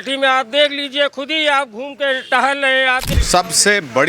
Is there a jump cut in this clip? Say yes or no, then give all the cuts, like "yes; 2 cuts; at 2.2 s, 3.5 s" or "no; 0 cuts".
yes; 1 cut; at 3.1 s